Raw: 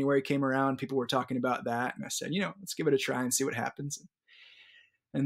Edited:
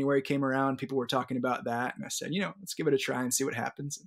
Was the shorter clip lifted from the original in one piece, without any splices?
yes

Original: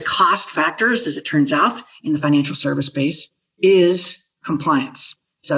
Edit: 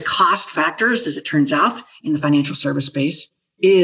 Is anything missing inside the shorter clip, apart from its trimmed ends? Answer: no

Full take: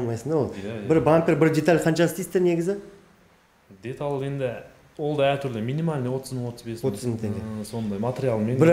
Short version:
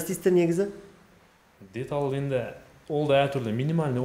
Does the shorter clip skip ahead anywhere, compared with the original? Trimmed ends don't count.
no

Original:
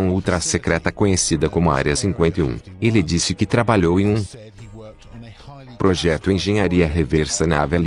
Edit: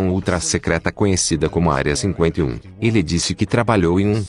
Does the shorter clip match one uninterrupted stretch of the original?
yes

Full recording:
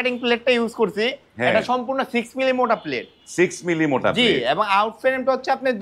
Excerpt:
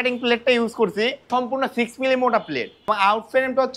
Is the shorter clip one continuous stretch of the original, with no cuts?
no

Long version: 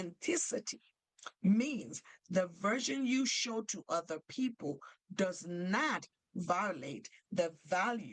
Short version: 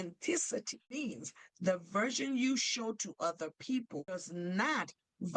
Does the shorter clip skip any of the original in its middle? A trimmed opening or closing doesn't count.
yes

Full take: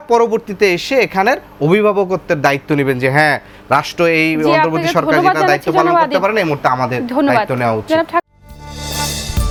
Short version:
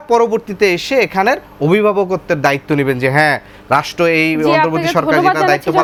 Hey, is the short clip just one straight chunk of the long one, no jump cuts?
yes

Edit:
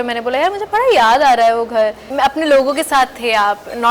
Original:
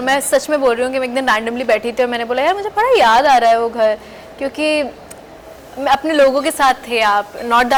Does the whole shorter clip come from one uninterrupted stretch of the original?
no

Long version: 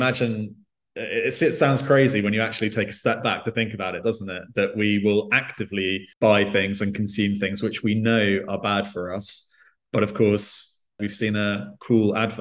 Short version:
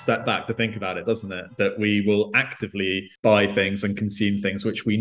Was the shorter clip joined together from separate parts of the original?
no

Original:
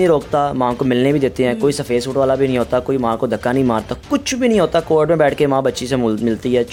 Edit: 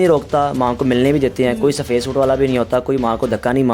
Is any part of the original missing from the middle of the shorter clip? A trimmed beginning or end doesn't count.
no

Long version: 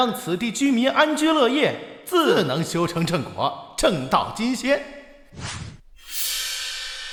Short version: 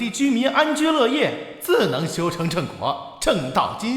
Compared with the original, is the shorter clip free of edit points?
no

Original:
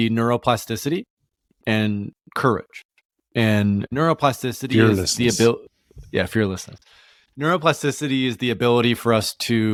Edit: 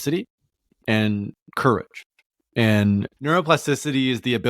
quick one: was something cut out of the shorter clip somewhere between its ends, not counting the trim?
yes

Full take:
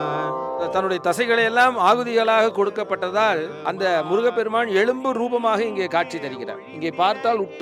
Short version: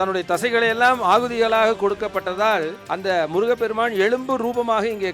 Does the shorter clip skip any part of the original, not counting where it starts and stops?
no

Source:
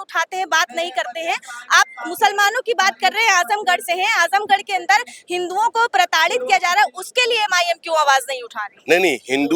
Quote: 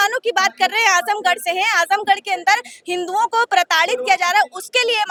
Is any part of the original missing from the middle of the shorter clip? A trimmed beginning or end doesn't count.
no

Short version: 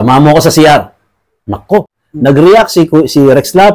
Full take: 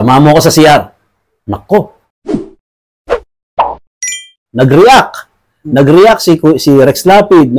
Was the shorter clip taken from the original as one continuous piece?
no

